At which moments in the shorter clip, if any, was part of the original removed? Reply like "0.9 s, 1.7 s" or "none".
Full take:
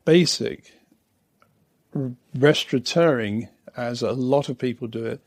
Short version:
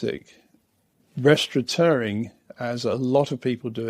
1.0 s